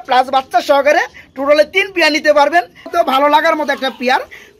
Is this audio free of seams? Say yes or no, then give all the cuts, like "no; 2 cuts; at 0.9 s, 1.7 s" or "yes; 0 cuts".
no; 1 cut; at 2.9 s